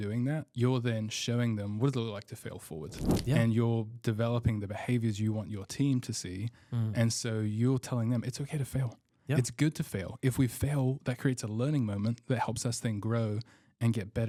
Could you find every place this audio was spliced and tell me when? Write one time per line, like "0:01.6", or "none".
none